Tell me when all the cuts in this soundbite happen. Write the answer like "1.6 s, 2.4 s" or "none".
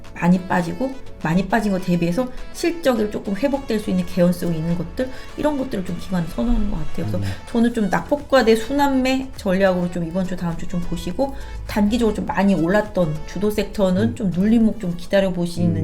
1.1 s